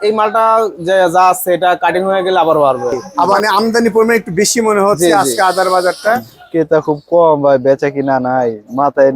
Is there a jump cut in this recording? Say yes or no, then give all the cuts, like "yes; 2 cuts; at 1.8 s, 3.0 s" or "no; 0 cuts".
yes; 2 cuts; at 3.4 s, 6.4 s